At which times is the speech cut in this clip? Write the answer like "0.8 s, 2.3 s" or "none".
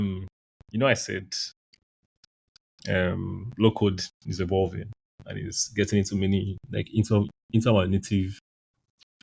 none